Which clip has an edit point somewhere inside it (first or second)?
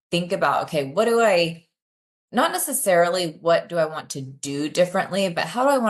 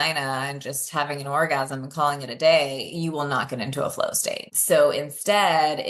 second